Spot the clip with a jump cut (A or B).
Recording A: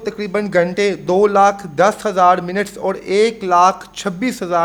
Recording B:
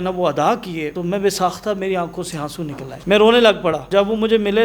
B